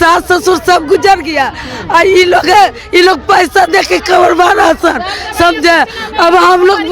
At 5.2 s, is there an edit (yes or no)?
no